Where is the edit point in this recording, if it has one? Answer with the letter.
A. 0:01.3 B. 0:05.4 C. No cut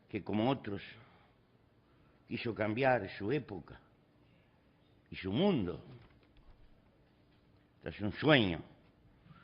B